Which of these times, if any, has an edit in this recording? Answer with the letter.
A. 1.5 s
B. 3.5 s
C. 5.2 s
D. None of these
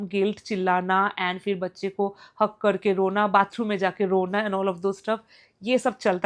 D